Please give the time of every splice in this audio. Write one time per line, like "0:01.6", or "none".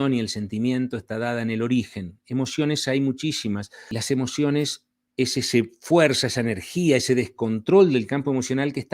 0:03.9